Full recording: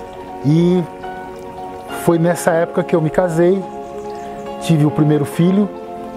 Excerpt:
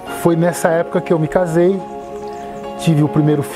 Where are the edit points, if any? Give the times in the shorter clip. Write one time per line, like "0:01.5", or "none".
none